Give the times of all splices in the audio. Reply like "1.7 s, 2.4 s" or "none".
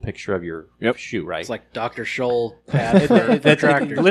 none

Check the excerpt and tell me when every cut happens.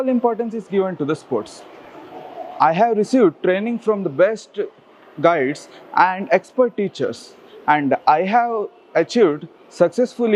none

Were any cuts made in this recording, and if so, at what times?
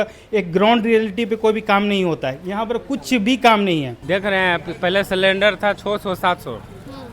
4.0 s

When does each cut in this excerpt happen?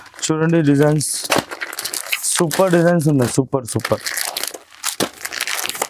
none

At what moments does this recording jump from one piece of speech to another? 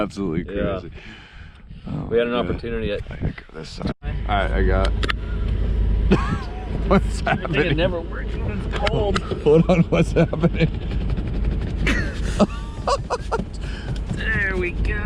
4.0 s

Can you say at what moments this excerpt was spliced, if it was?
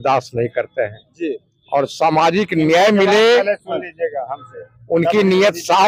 none

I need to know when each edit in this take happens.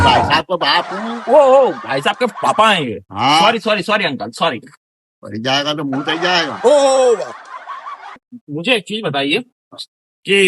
none

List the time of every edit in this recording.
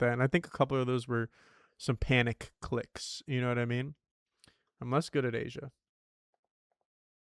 none

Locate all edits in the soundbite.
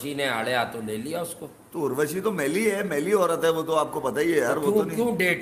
none

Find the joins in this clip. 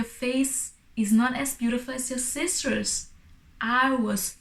none

